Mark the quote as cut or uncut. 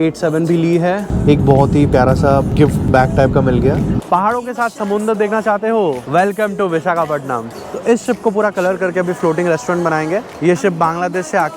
cut